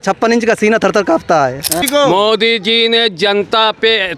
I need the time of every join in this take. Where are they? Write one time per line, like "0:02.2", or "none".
0:01.8

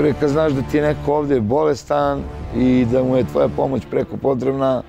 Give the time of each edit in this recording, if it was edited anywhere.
none

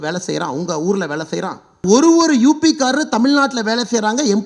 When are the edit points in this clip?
0:01.8

